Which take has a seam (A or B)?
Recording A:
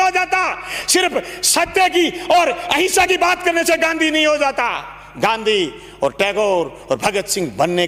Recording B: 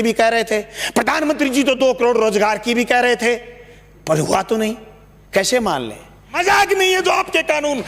B